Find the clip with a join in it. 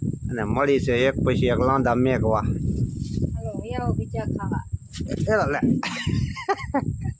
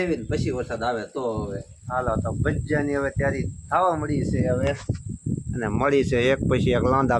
second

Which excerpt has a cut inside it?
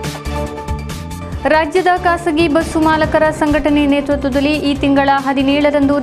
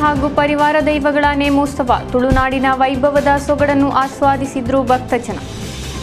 first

